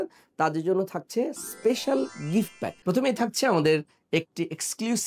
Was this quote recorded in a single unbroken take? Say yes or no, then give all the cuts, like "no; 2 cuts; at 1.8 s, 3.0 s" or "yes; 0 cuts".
no; 1 cut; at 2.7 s